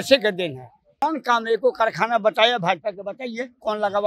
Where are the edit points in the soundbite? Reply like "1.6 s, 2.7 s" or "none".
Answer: 1.0 s